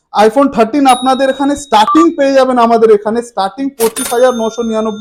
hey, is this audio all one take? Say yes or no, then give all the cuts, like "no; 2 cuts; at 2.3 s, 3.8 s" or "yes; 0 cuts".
yes; 0 cuts